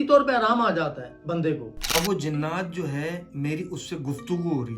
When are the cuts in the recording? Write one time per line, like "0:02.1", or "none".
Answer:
0:01.8

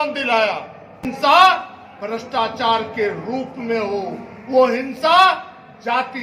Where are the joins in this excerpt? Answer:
0:01.1

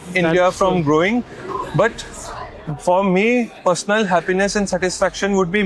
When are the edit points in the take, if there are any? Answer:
none

